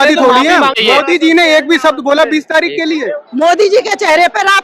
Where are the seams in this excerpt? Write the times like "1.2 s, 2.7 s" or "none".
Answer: 0.8 s, 3.2 s